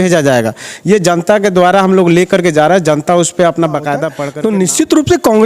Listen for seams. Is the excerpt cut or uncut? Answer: cut